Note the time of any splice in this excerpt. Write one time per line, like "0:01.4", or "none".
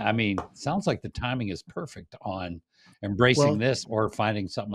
none